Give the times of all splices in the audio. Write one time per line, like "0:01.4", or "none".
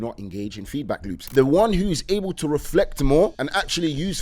0:01.1
0:03.4